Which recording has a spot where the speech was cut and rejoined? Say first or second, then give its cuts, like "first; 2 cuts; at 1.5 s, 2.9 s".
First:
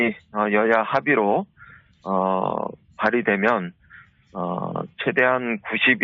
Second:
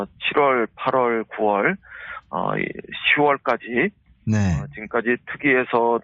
first; 1 cut; at 3.2 s